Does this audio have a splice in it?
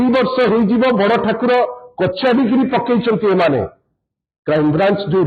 no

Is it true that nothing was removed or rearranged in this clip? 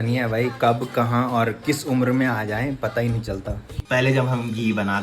no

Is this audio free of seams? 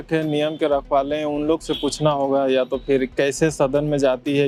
yes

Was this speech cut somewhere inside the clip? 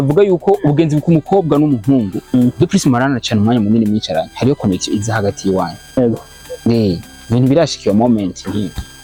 no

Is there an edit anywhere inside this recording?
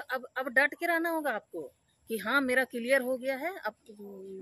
no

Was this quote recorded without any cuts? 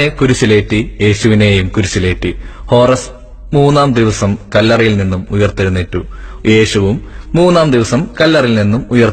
yes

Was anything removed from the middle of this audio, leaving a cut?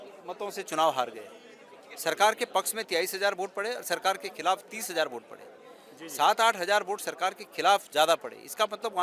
no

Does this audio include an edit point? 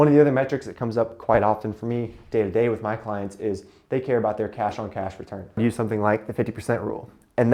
yes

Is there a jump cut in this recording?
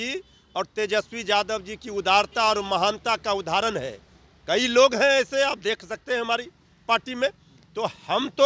no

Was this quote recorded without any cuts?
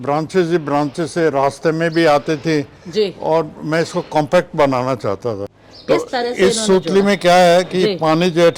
no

